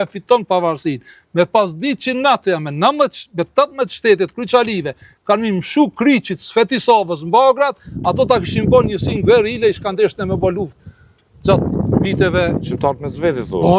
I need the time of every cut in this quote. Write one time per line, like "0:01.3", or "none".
none